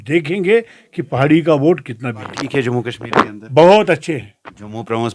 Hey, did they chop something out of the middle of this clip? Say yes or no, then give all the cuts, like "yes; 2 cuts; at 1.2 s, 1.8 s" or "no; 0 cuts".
yes; 1 cut; at 2.4 s